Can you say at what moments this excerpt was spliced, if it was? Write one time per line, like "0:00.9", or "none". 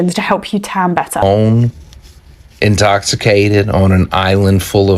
0:01.2